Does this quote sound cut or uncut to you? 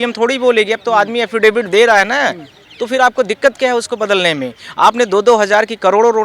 uncut